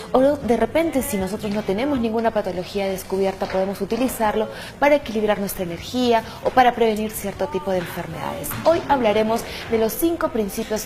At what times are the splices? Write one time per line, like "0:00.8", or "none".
0:06.9